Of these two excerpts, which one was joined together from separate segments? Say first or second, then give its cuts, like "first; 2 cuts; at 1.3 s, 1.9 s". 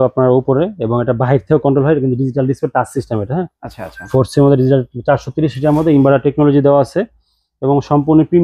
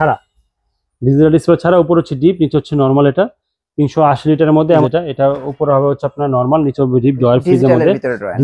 second; 1 cut; at 4.8 s